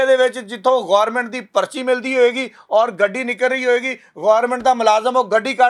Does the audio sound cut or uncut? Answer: uncut